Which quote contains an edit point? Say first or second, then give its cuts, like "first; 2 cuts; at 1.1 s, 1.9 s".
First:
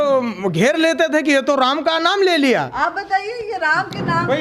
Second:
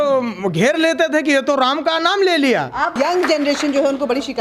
second; 1 cut; at 3.0 s